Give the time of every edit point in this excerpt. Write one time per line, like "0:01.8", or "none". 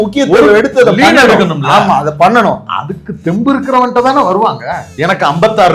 0:04.8